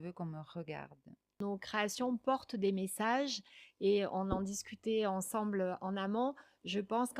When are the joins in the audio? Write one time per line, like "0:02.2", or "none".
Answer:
0:01.4